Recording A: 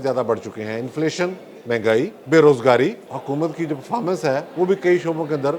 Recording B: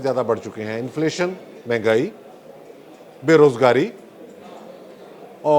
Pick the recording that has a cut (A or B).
A